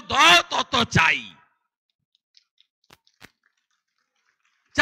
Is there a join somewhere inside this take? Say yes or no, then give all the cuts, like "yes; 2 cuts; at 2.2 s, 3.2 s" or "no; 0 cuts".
no; 0 cuts